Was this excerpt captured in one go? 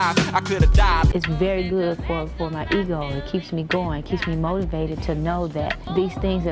no; 1 cut; at 1.1 s

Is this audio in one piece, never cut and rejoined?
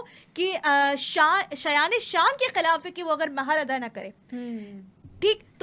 yes; 0 cuts

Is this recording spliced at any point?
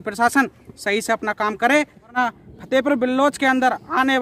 yes; 1 cut; at 2.1 s

